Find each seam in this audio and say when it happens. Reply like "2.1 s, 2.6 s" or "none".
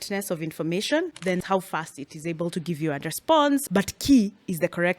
1.4 s, 3.6 s

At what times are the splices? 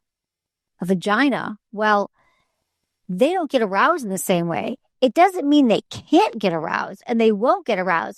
none

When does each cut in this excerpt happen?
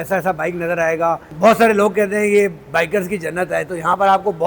1.3 s

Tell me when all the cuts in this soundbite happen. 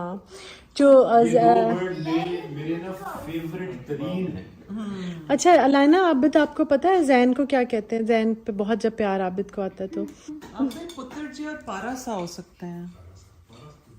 10.4 s

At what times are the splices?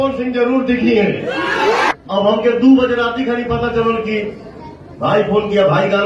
1.9 s

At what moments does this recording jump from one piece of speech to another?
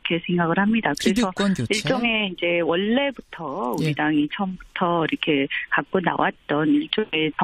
1.5 s

